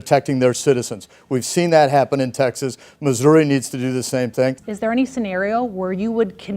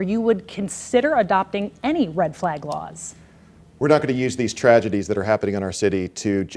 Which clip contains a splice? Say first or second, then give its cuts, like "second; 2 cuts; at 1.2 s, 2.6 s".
first; 1 cut; at 4.7 s